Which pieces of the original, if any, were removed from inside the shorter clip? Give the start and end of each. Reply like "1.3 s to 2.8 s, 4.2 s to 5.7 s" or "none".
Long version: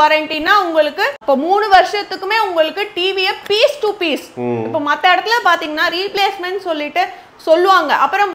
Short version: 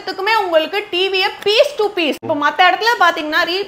4.3 s to 4.7 s